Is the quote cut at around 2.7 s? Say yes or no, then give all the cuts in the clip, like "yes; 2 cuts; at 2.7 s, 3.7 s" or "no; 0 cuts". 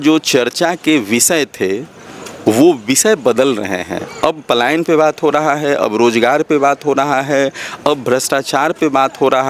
no; 0 cuts